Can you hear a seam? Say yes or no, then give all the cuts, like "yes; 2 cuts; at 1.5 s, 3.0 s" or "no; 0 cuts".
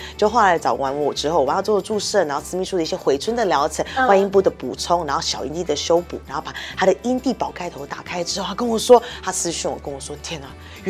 no; 0 cuts